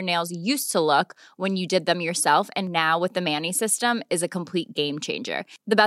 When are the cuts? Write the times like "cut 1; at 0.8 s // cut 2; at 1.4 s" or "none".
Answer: none